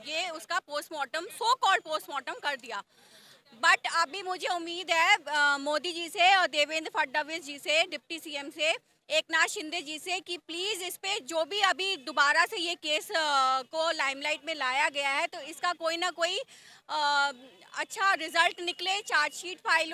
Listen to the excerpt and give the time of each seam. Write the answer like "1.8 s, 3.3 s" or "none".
none